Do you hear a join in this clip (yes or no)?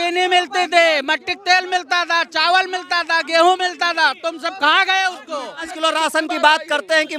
yes